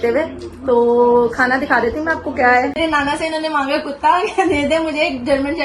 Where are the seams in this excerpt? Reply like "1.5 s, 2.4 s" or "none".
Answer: 2.8 s